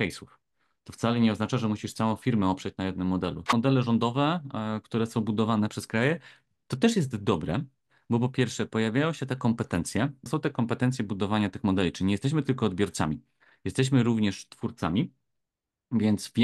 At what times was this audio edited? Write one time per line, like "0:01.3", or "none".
0:03.5
0:10.3